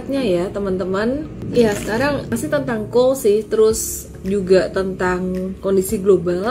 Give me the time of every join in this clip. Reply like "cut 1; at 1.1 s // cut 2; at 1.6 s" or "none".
cut 1; at 1.4 s // cut 2; at 2.4 s // cut 3; at 4.1 s